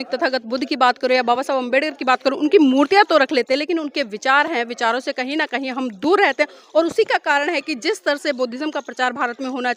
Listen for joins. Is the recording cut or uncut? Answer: uncut